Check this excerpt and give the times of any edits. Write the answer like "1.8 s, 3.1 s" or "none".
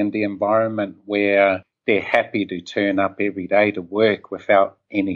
1.7 s